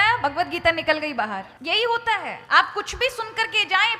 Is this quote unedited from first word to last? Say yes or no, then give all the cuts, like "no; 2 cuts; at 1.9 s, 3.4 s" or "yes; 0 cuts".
no; 2 cuts; at 1.5 s, 2.4 s